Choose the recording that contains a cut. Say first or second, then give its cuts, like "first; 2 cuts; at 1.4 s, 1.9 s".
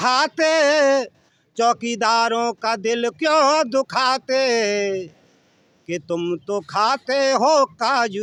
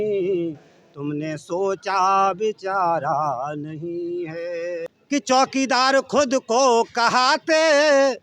second; 1 cut; at 4.9 s